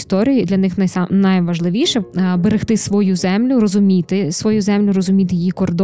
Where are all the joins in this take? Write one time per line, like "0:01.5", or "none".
0:02.0